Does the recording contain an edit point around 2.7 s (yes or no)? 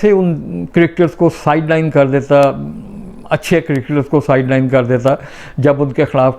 no